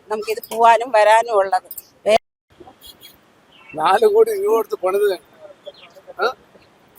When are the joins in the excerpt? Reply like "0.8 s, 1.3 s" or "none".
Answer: 2.2 s